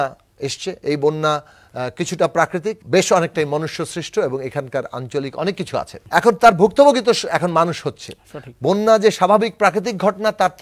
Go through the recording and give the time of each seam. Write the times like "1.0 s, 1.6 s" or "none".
2.8 s, 6.0 s